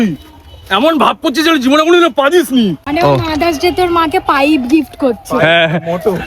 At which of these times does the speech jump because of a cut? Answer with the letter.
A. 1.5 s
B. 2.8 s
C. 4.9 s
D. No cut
B